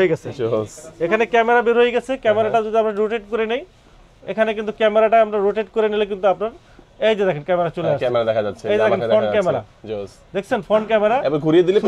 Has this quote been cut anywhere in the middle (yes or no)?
no